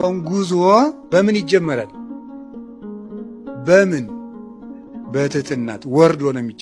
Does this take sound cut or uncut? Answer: uncut